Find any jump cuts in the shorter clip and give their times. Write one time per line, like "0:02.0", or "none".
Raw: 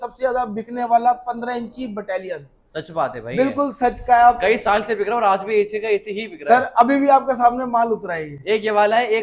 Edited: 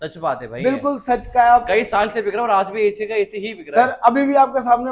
none